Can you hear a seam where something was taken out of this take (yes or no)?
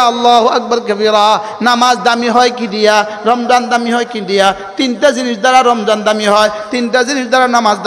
no